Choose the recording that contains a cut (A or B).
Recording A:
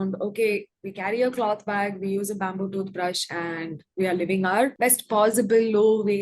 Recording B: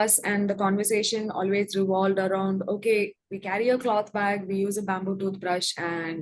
A